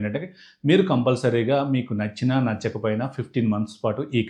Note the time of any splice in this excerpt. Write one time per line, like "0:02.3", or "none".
none